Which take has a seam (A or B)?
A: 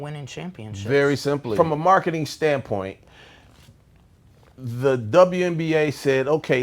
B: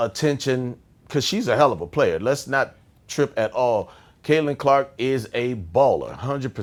A